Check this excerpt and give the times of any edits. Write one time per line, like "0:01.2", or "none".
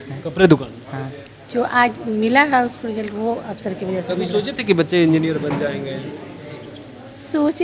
0:01.2

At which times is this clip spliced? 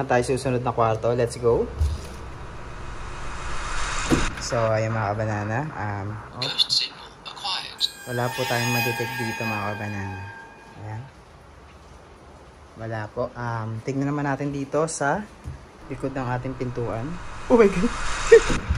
0:06.3
0:10.7

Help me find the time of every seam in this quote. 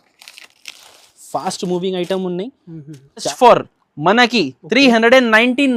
0:03.3

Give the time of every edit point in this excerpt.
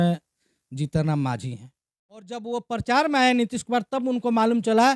0:02.4

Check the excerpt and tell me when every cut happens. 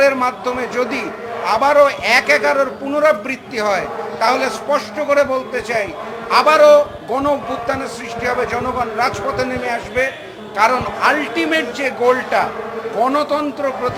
none

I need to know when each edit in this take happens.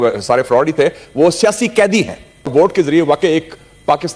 0:02.5

